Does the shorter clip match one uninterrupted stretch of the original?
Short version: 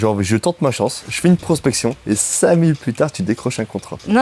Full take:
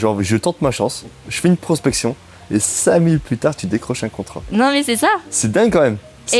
no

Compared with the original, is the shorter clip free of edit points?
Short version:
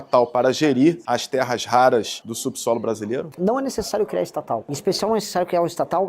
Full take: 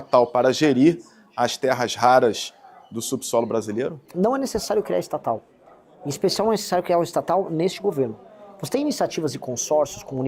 no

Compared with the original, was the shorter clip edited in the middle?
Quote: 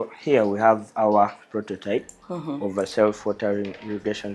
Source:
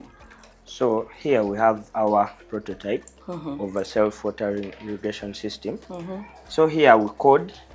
no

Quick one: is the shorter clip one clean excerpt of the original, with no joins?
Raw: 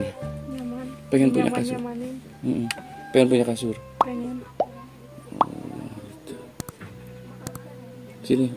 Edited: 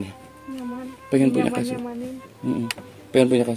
yes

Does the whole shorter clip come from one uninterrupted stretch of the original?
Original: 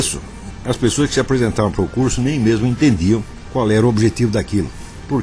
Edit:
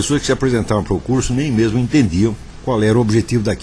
yes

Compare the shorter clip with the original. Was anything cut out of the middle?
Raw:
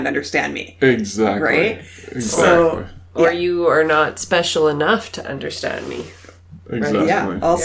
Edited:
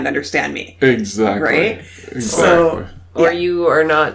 no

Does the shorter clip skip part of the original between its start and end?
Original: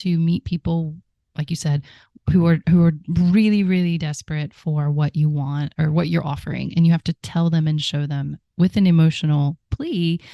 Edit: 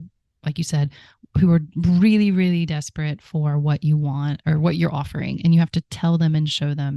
yes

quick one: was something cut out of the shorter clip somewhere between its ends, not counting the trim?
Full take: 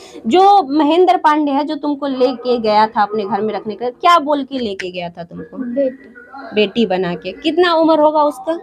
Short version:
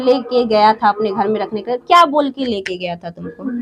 no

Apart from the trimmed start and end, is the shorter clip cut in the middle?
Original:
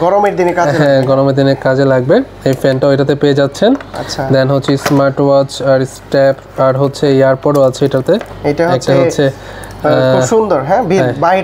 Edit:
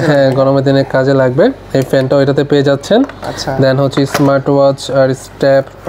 no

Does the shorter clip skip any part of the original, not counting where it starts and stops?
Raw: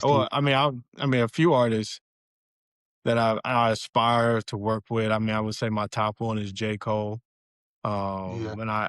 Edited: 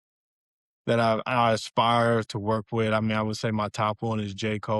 no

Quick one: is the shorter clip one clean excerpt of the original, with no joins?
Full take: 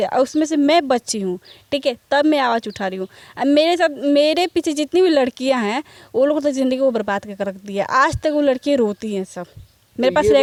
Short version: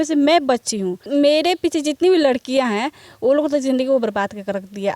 no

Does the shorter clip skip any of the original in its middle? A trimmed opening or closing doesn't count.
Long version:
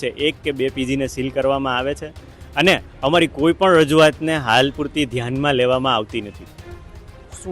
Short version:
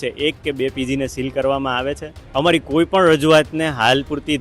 yes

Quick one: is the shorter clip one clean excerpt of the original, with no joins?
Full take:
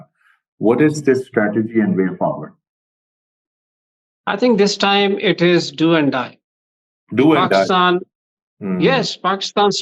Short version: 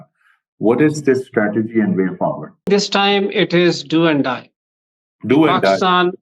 no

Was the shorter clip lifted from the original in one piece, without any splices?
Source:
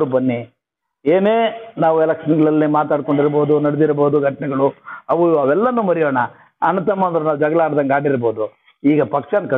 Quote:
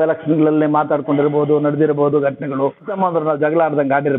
no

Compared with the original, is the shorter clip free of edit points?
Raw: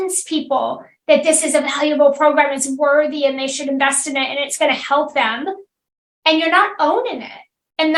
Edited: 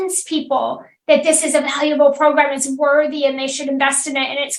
yes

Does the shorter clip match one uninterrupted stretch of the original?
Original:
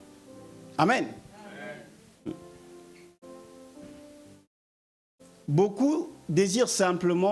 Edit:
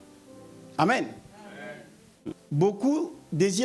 no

